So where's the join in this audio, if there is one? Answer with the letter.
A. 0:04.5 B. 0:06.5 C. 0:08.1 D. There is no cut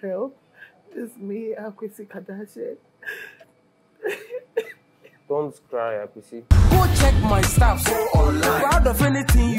B